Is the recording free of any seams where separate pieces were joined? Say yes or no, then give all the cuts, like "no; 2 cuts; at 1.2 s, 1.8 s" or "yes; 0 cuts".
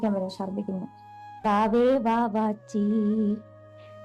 no; 1 cut; at 1.4 s